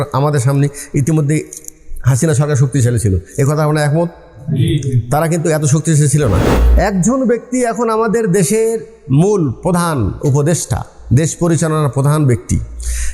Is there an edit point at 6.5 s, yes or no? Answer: yes